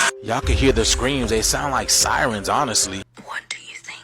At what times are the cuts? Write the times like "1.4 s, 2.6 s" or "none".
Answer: 3.1 s